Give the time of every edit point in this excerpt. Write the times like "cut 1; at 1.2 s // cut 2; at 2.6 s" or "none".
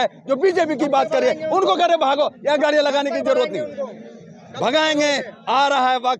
none

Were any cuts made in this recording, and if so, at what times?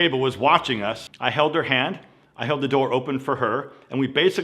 cut 1; at 1.0 s

